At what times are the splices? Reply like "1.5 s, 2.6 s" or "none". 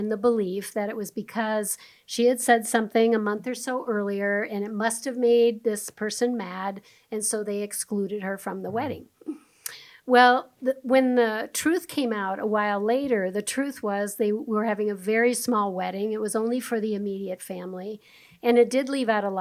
none